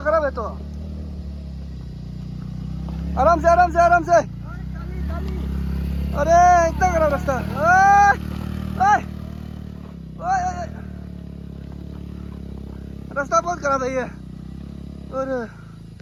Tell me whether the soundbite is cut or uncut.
uncut